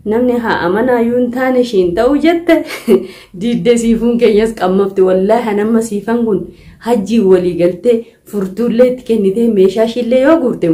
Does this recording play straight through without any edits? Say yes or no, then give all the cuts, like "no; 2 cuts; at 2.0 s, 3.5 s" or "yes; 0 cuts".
yes; 0 cuts